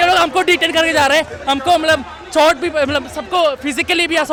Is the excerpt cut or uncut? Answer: uncut